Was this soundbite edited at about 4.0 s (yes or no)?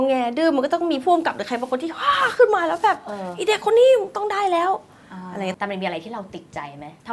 no